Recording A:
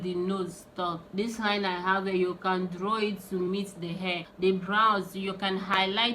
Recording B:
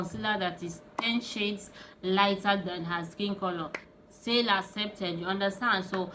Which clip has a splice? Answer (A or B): A